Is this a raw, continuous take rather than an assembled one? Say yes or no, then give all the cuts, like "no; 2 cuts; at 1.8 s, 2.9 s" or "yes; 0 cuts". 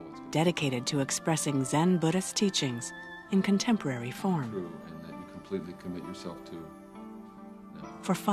no; 1 cut; at 3.8 s